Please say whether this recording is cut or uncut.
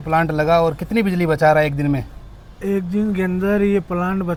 uncut